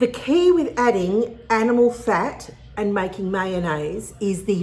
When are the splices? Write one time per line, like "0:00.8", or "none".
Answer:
none